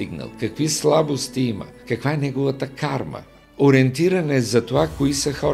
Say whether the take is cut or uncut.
cut